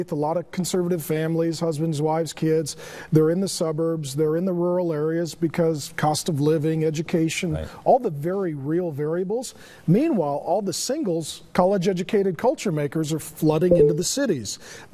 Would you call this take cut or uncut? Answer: cut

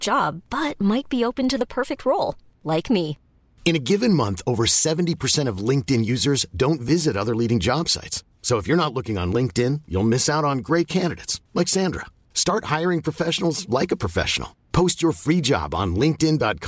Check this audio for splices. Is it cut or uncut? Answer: uncut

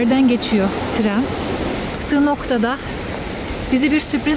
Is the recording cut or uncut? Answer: cut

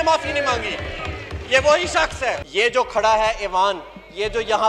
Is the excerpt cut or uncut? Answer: cut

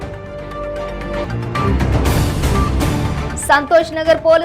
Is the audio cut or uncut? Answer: cut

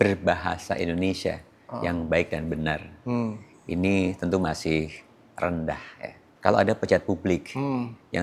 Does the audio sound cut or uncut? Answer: cut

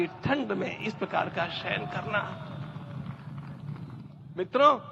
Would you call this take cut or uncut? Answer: uncut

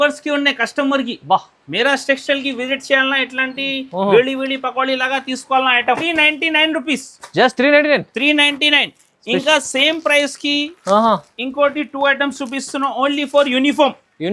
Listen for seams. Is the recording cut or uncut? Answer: cut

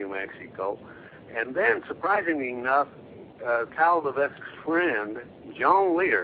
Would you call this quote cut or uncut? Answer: cut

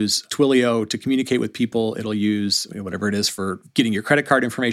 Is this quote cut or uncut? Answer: uncut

